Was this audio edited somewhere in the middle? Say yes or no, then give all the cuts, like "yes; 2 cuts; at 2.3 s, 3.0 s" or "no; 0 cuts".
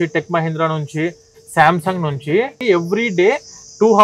yes; 1 cut; at 2.5 s